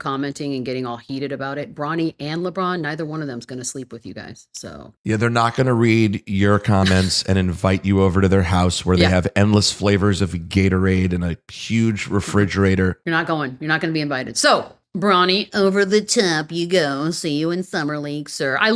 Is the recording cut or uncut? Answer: uncut